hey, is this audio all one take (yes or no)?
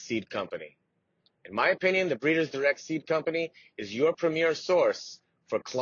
yes